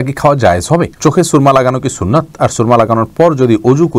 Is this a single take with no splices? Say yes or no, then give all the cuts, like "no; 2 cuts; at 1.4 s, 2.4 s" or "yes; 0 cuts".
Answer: no; 1 cut; at 0.9 s